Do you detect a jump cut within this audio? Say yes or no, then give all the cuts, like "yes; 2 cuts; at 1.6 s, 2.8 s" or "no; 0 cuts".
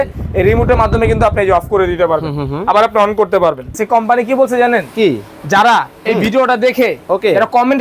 yes; 1 cut; at 3.8 s